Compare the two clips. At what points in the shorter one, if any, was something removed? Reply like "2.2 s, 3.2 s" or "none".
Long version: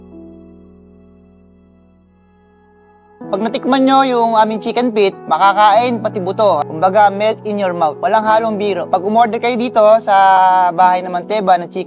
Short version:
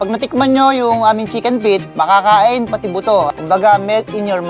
none